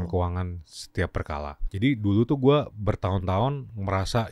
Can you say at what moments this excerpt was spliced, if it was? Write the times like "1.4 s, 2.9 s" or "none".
1.6 s